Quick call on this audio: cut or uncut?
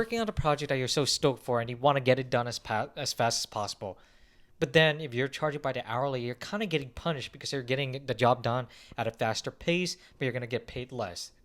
uncut